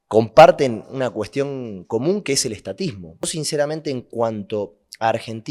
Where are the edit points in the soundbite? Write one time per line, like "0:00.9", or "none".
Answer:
0:03.2